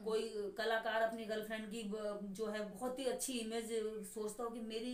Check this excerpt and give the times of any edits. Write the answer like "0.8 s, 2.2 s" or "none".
none

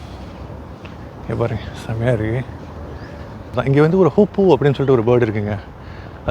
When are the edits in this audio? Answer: 3.5 s

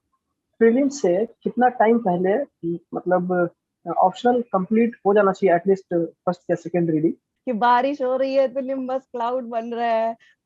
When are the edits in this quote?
7.3 s

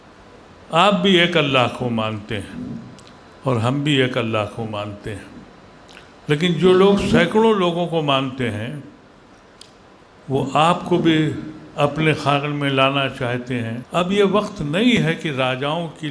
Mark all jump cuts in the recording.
13.8 s

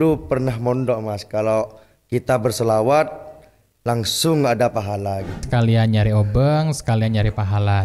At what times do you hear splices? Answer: 5.4 s

